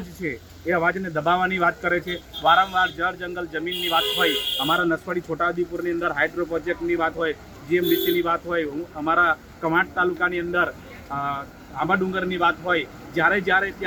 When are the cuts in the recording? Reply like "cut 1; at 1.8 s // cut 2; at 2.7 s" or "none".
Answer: none